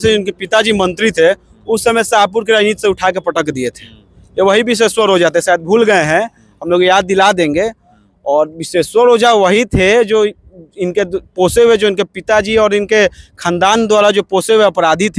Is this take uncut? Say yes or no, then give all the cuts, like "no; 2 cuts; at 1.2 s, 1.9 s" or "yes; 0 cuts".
yes; 0 cuts